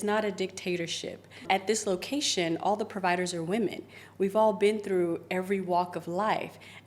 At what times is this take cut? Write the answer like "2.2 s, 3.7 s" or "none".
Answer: 1.4 s